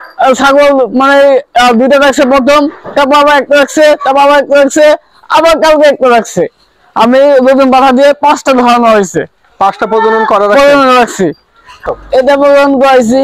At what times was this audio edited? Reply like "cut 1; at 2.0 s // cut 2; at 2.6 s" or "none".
cut 1; at 11.7 s